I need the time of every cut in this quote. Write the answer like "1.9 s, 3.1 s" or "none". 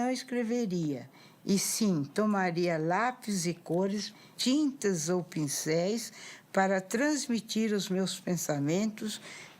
4.2 s